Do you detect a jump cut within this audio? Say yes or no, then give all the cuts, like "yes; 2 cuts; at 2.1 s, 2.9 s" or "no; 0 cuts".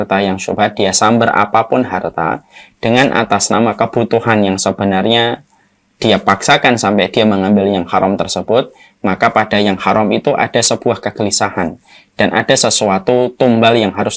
no; 0 cuts